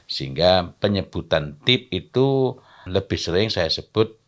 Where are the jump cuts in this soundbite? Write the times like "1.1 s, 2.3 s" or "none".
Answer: 2.8 s